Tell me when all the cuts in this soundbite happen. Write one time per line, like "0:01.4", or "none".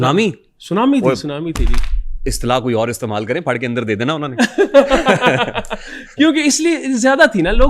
none